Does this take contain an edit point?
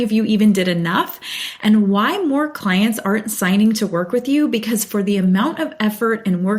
no; 0 cuts

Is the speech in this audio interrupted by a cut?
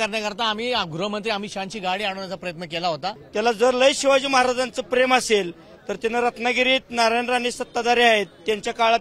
yes; 1 cut; at 3.2 s

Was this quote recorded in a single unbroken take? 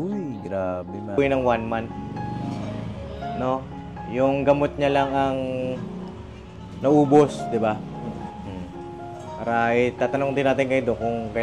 no; 1 cut; at 1.2 s

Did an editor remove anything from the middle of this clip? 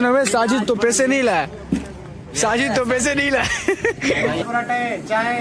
yes; 1 cut; at 4.4 s

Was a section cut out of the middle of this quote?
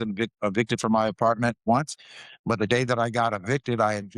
yes; 1 cut; at 1.6 s

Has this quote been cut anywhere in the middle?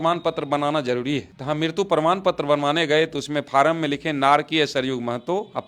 no; 0 cuts

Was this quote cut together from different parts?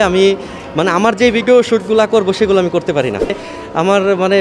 yes; 1 cut; at 3.4 s

